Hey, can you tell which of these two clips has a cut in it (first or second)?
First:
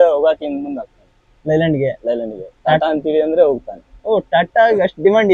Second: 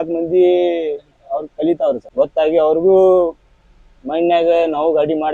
second